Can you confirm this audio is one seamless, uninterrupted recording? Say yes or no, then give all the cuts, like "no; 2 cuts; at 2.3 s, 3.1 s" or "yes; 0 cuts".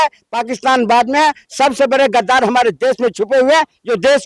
yes; 0 cuts